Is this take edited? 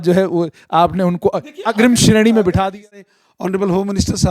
yes; 1 cut; at 3.1 s

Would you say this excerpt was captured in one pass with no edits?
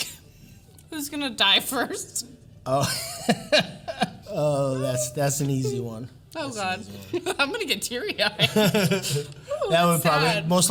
yes; 0 cuts

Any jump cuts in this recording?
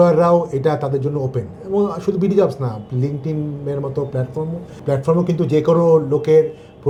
no; 0 cuts

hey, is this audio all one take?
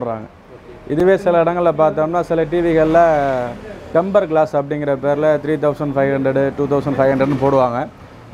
yes; 0 cuts

